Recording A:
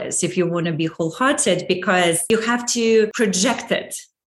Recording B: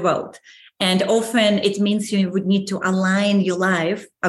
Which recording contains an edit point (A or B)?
A